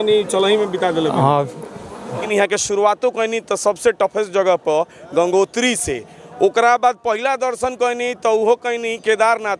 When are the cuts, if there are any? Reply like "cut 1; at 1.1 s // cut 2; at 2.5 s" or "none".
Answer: cut 1; at 2.2 s